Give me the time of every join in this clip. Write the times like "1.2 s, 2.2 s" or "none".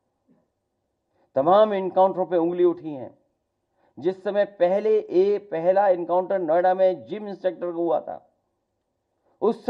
none

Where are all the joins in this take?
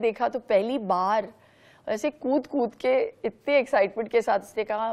none

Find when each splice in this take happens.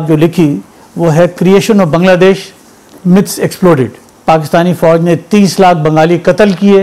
4.1 s

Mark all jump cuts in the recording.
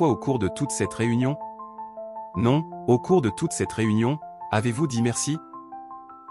none

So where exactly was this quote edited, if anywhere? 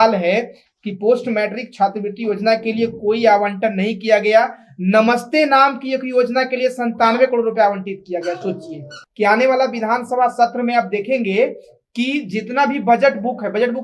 9.0 s

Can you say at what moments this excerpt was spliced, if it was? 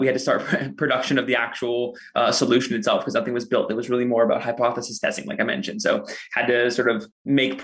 none

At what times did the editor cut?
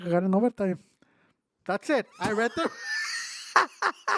none

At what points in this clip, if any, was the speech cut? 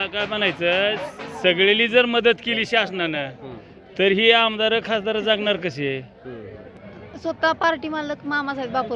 6.6 s

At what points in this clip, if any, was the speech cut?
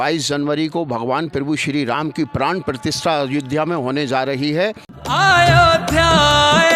4.9 s

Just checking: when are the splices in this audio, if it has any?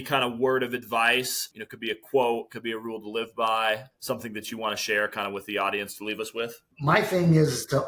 1.4 s, 3.9 s, 6.7 s

